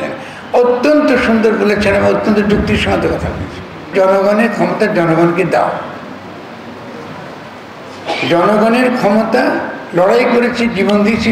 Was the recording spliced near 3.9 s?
yes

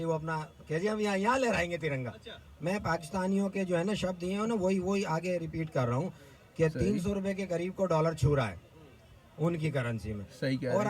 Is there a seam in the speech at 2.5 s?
yes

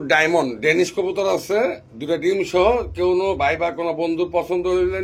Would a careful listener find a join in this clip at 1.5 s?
no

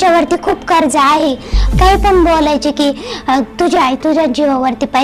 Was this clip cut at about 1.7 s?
yes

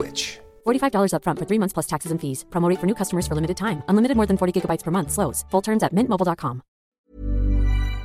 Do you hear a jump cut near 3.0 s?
no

